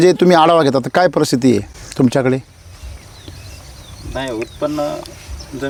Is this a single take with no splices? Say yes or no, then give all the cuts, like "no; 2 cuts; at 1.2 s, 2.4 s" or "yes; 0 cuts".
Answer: yes; 0 cuts